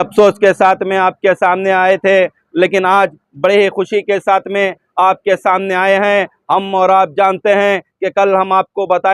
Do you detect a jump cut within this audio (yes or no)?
no